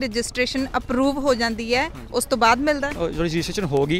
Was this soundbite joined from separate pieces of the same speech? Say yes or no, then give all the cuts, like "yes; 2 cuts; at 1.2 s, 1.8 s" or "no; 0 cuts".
yes; 1 cut; at 2.9 s